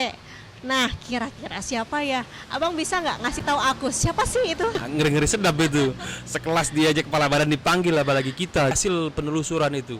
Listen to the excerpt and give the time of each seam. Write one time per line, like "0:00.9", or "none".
0:04.8
0:08.7